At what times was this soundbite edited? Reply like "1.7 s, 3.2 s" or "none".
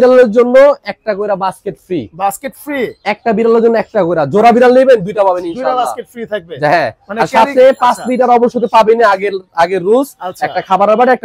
none